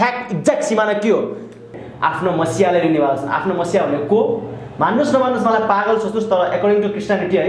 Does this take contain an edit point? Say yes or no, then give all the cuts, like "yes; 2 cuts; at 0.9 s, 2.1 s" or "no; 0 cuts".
yes; 1 cut; at 1.8 s